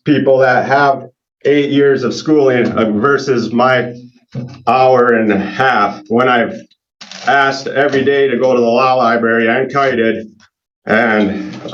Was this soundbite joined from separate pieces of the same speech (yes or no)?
no